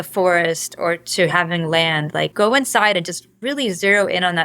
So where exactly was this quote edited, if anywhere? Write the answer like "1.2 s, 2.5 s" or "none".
2.3 s